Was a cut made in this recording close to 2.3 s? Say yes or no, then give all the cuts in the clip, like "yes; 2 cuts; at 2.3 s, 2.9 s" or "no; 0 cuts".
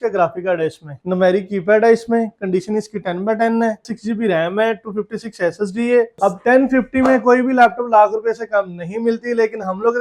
no; 3 cuts; at 1.0 s, 3.8 s, 6.1 s